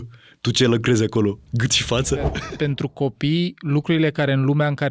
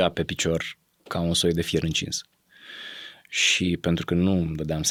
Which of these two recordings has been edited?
first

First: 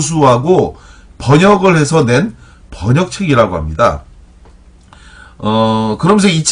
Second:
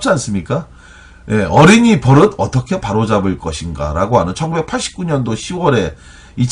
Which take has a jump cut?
second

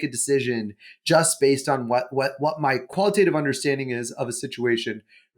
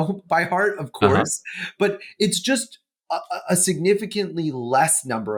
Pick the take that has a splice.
first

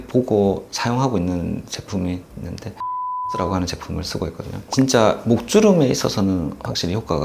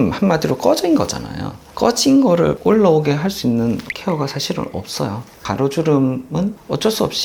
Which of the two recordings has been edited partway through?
second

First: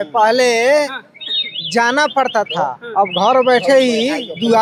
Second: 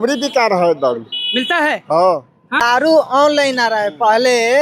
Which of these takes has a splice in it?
second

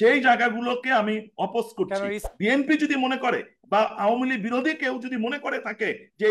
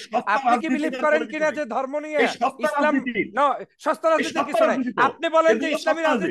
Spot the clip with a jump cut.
first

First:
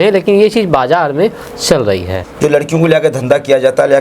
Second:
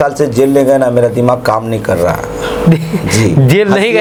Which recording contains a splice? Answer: first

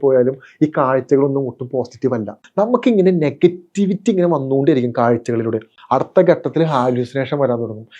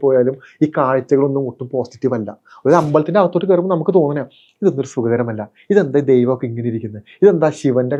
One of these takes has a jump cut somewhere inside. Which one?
first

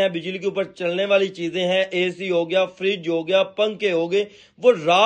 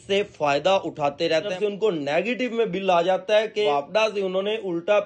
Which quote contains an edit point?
second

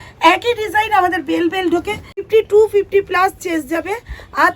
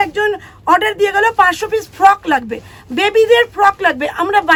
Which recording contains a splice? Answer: first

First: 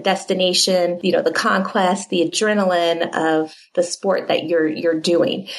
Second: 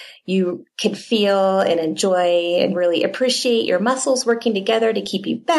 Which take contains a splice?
first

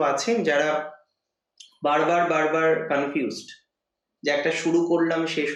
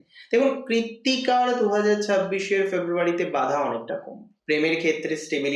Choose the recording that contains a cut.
second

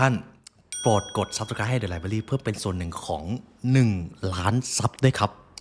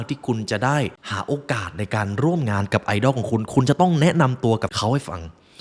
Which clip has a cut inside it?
second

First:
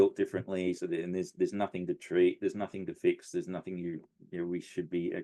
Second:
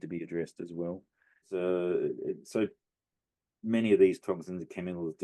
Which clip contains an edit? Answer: second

